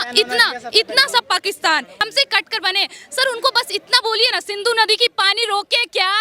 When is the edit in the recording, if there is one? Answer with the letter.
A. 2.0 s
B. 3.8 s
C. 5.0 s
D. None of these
A